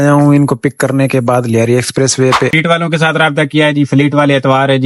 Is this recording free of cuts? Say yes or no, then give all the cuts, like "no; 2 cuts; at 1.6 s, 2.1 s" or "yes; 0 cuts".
no; 1 cut; at 2.5 s